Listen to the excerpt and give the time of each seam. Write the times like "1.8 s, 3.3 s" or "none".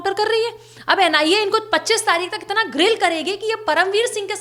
none